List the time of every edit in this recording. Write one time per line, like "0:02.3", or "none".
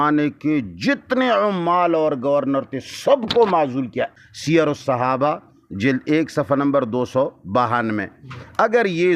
0:04.1